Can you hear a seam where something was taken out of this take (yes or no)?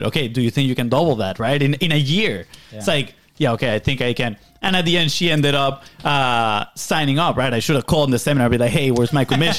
no